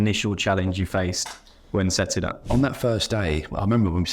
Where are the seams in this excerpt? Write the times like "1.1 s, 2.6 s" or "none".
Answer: 2.4 s